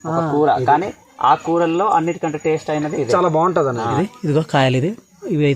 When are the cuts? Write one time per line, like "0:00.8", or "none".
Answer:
0:04.5